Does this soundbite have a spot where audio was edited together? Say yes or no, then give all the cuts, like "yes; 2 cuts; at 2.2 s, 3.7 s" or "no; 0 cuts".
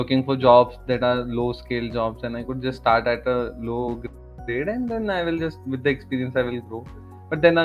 no; 0 cuts